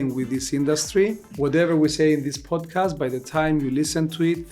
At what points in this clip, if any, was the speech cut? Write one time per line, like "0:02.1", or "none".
0:01.2